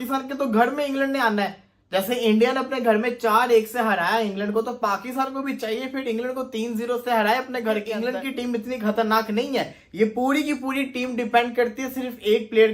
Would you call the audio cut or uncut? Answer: cut